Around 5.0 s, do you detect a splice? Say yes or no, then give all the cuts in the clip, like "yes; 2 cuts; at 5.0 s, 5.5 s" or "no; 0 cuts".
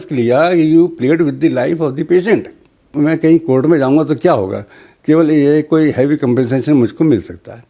no; 1 cut; at 2.9 s